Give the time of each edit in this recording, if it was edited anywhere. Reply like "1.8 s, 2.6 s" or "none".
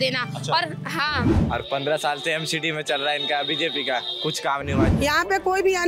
1.4 s, 4.9 s